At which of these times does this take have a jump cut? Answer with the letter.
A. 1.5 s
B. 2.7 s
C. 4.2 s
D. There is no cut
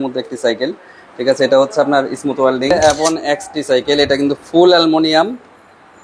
B